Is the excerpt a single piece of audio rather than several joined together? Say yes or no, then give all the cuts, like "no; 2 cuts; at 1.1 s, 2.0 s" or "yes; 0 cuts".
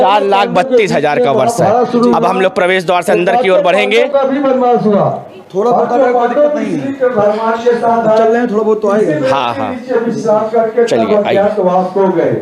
yes; 0 cuts